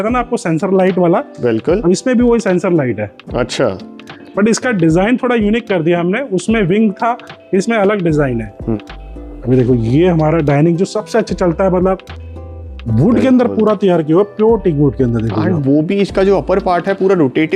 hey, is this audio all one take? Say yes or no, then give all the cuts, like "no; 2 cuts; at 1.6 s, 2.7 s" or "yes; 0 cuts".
yes; 0 cuts